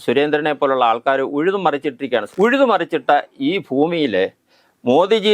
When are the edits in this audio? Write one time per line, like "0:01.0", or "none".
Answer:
0:02.3